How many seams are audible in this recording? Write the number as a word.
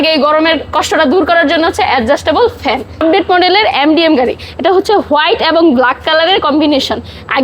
one